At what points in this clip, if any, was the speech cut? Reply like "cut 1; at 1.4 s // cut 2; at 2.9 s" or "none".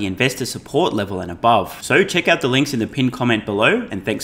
none